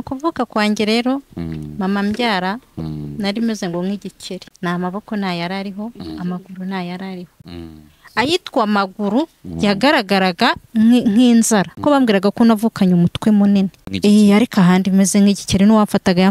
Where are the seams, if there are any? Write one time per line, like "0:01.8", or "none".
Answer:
0:04.5
0:11.7
0:13.8

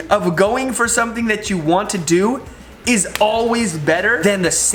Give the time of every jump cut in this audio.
none

